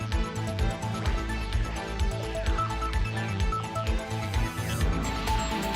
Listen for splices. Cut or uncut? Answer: cut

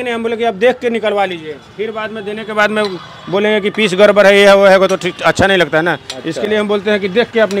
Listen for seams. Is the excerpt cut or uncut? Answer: uncut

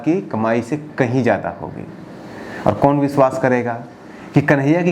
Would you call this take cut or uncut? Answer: uncut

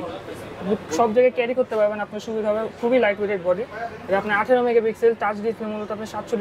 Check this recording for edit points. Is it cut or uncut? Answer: uncut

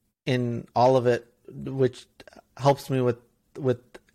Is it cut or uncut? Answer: uncut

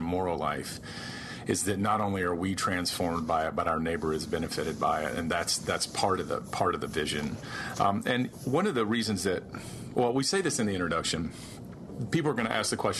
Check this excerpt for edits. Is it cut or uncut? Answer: uncut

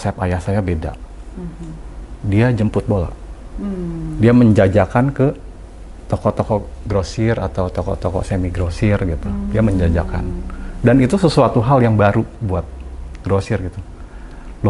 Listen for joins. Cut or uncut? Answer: uncut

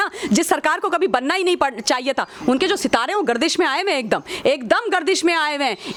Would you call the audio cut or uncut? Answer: uncut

